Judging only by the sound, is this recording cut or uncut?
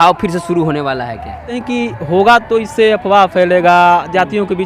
cut